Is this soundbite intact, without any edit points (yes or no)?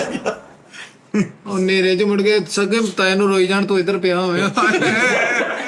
no